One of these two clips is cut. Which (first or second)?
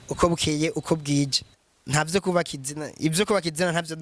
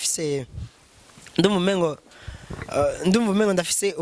first